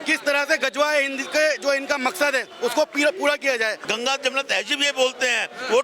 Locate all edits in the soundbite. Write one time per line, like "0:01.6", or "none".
0:03.8